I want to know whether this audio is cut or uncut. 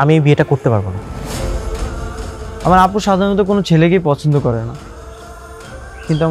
cut